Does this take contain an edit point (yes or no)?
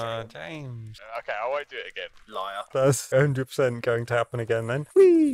no